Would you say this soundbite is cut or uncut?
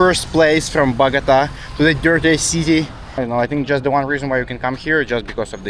cut